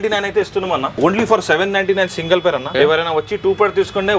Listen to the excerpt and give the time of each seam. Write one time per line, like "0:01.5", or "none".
0:00.9
0:02.7